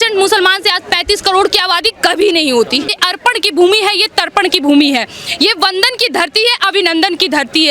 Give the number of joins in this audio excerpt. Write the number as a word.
one